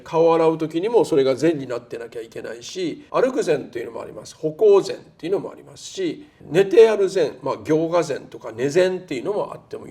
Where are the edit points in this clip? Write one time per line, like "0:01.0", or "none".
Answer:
0:03.0
0:06.3